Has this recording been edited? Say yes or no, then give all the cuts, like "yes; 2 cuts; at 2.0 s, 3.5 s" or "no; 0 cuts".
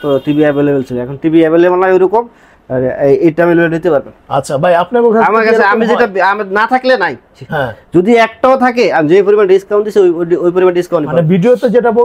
no; 0 cuts